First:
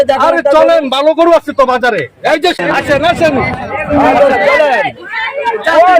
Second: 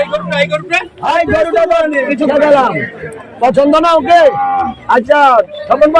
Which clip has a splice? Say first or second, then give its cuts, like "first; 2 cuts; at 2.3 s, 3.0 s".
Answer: first; 1 cut; at 2.6 s